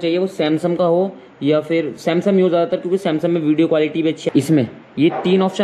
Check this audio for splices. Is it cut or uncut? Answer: cut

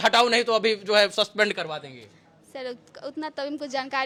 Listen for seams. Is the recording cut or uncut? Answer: uncut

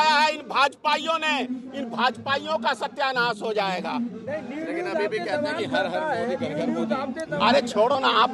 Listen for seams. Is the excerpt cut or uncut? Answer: uncut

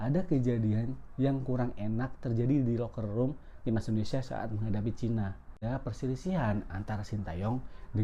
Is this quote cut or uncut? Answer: cut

